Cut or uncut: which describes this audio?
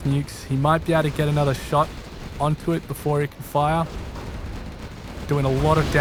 uncut